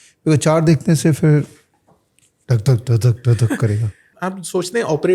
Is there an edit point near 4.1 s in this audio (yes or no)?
yes